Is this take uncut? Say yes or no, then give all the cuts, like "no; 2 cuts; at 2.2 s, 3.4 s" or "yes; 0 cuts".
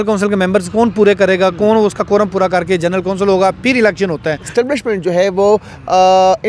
no; 1 cut; at 4.4 s